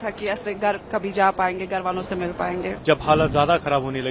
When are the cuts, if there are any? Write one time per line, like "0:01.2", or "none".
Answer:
0:02.8